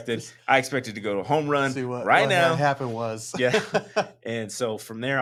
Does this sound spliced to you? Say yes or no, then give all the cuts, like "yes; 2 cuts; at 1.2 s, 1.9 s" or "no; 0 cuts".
no; 0 cuts